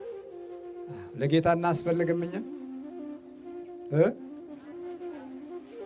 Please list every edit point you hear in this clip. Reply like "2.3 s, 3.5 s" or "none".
1.1 s